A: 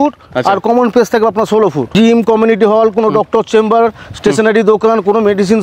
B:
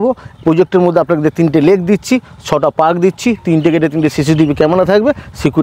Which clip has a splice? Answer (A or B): A